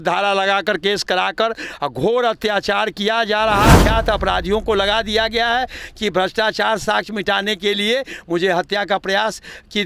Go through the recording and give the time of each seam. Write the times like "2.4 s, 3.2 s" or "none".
3.8 s